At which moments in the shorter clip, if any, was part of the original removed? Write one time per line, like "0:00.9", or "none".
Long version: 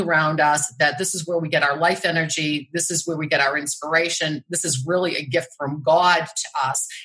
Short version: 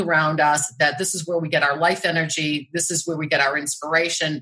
none